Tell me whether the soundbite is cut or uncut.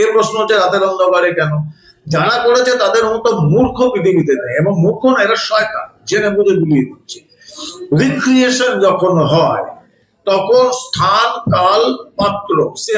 uncut